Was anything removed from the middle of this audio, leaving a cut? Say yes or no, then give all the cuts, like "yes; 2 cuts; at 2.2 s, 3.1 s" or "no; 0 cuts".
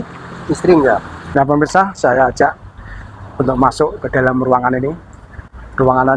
yes; 1 cut; at 1.2 s